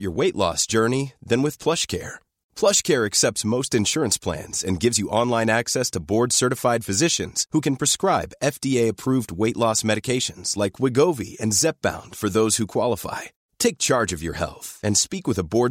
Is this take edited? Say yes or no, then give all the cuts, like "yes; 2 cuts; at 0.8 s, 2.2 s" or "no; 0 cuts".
no; 0 cuts